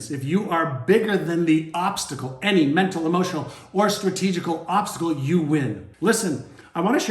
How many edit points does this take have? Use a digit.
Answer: 1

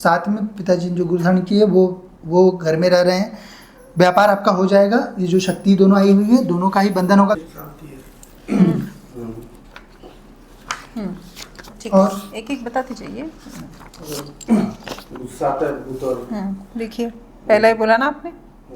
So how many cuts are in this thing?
1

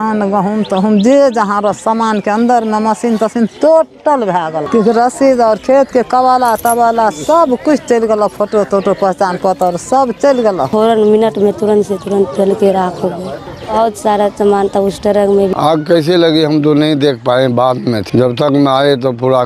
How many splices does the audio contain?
4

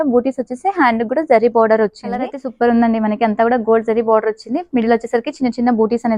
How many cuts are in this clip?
1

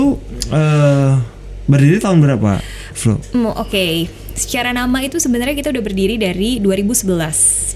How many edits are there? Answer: 0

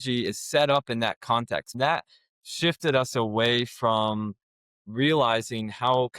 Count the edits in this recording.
1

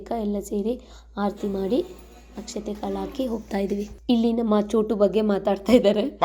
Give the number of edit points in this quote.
1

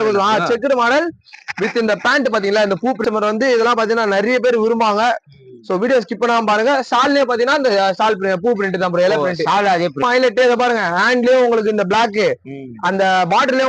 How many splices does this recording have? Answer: 2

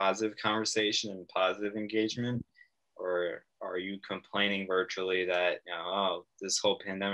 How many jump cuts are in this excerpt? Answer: 1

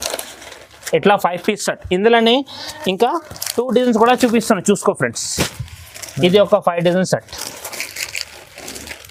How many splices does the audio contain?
0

